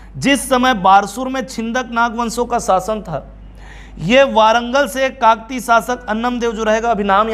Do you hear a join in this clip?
no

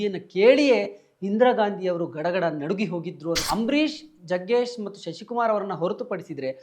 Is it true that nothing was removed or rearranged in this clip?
no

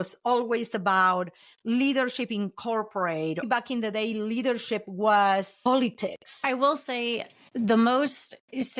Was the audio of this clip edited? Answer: yes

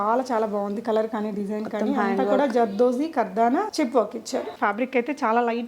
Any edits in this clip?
yes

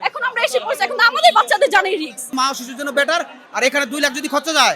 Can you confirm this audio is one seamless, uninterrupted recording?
no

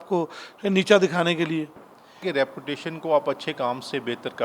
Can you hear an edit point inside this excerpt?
yes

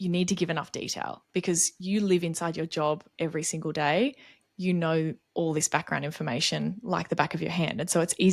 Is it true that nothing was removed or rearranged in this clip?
yes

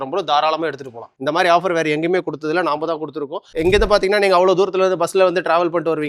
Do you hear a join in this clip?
yes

